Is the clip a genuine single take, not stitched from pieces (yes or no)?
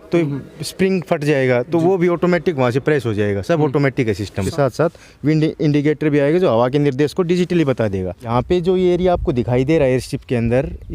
no